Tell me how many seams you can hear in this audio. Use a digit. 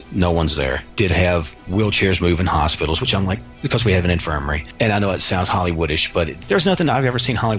4